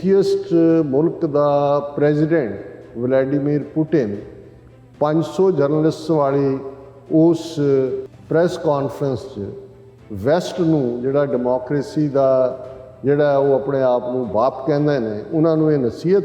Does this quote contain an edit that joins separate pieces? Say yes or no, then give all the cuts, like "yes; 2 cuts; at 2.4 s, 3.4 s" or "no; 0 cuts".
yes; 1 cut; at 8.1 s